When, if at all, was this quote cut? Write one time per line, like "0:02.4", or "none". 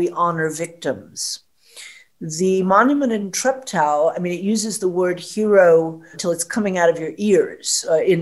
0:03.3
0:06.2